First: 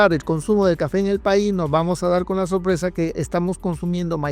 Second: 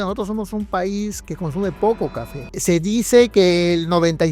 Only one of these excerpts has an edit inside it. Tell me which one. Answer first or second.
second